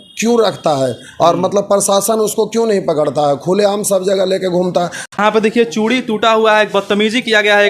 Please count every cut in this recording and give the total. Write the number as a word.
one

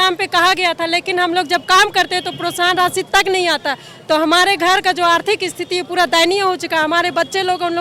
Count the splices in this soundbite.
zero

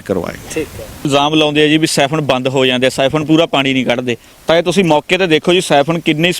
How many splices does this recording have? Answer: one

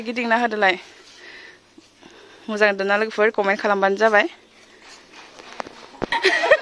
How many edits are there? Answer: zero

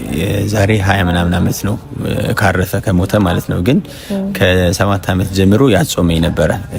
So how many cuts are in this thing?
zero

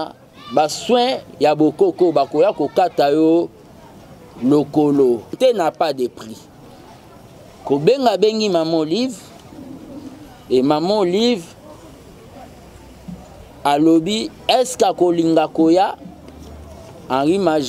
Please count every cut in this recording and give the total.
one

